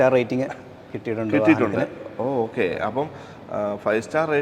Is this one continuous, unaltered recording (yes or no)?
yes